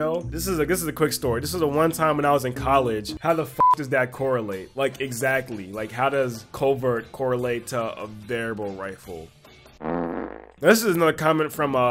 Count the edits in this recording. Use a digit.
2